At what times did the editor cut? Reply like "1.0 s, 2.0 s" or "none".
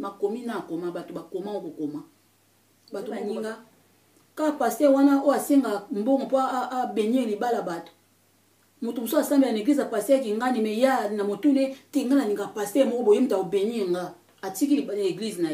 3.2 s